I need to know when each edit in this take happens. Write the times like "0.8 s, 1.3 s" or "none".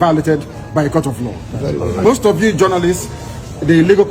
2.0 s